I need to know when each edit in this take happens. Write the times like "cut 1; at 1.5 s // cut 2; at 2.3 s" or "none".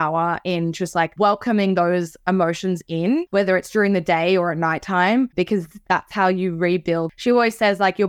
cut 1; at 1.1 s // cut 2; at 3.3 s // cut 3; at 7.1 s